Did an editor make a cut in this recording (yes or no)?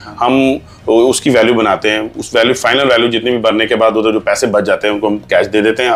no